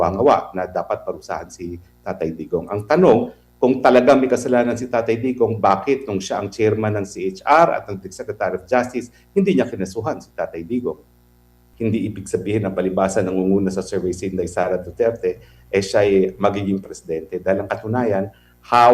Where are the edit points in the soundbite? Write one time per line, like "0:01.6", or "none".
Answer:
0:11.6